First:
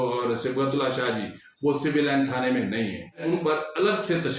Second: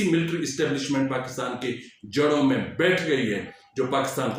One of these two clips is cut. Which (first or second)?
first